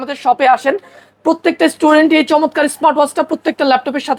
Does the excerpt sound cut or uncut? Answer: uncut